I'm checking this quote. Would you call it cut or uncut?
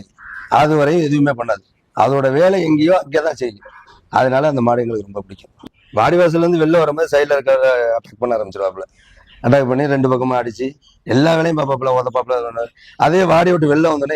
cut